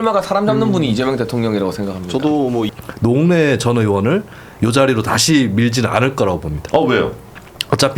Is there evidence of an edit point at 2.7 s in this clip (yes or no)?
yes